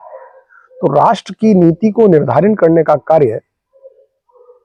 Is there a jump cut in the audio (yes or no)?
no